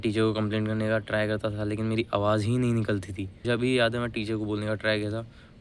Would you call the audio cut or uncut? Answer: cut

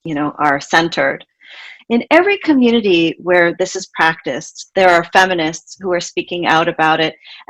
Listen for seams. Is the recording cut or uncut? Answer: cut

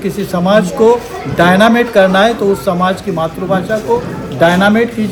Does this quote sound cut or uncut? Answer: uncut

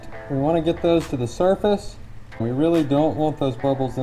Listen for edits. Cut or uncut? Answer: cut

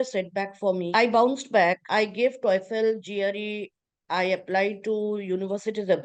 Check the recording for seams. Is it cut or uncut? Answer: cut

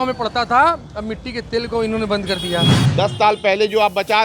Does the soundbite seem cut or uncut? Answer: cut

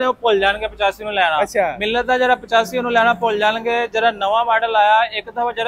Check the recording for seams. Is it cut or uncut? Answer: cut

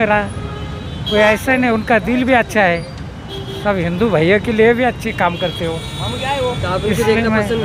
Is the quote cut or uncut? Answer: uncut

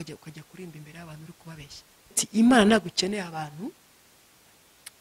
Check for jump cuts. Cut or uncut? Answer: cut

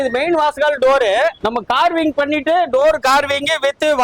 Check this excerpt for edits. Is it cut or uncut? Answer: cut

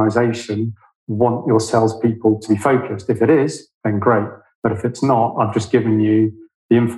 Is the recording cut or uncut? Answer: cut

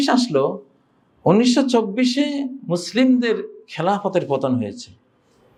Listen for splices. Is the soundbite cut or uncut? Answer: uncut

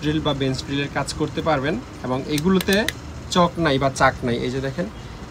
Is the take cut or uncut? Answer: uncut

